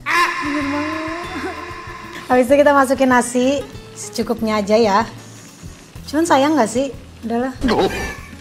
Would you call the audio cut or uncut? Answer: cut